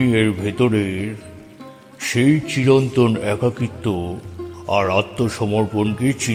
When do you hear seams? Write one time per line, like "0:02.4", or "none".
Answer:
none